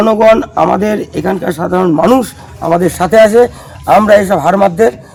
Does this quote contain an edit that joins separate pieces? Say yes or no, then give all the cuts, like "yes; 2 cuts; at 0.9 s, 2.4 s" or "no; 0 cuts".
no; 0 cuts